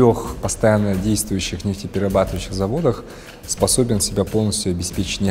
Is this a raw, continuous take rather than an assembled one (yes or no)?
yes